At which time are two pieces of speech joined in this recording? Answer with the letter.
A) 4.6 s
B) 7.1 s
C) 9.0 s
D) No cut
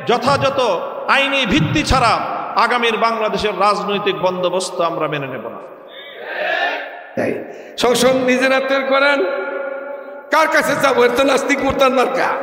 B